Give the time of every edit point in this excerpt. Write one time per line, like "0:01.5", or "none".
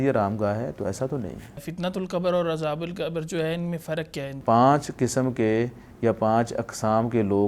0:01.7
0:04.3